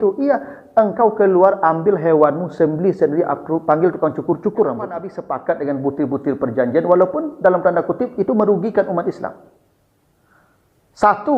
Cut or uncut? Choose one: cut